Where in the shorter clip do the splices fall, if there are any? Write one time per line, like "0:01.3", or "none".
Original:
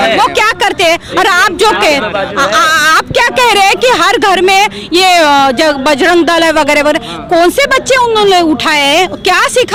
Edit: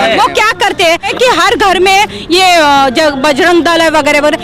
0:01.1

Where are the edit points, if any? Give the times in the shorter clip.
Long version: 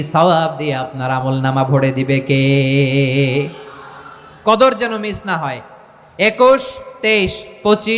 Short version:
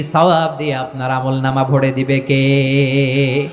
none

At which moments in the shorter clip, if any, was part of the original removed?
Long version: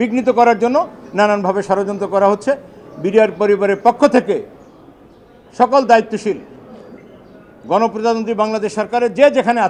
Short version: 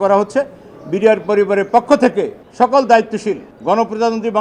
0:02.4
0:03.5

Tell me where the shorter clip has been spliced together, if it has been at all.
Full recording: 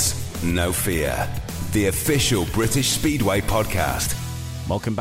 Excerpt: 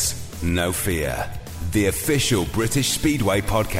none

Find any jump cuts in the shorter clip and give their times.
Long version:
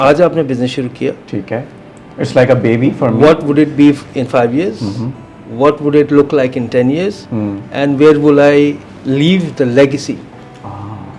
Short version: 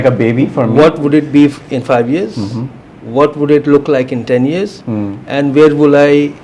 none

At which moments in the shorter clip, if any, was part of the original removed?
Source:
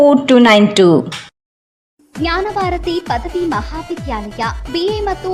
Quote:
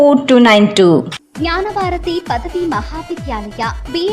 0:01.2

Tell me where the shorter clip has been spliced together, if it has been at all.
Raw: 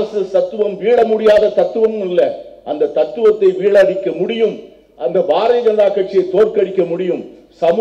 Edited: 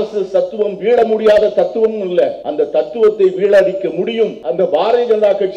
0:02.4
0:04.4

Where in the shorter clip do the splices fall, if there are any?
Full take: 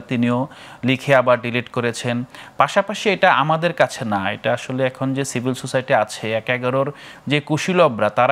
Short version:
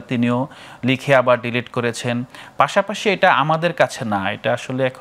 none

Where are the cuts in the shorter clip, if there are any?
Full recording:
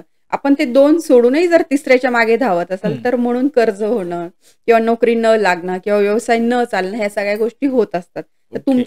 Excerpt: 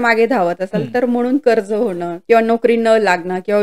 0:02.1

